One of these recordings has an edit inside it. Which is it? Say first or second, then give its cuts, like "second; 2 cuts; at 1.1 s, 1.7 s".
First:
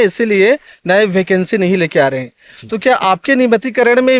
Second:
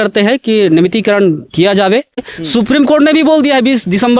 second; 1 cut; at 2.3 s